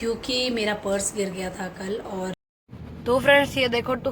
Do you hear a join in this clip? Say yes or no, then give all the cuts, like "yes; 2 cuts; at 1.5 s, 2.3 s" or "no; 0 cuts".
yes; 1 cut; at 2.4 s